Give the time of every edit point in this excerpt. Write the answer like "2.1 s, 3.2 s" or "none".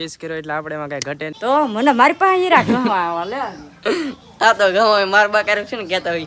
1.3 s